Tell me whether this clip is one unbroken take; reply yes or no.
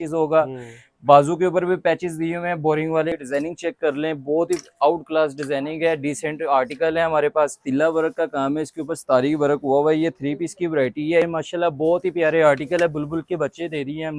no